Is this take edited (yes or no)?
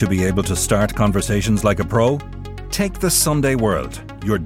no